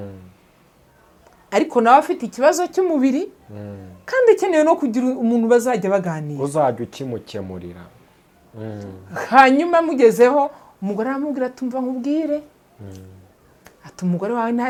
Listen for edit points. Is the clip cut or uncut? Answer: uncut